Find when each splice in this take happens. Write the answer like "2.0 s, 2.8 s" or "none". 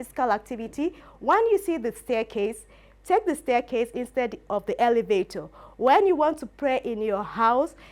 1.1 s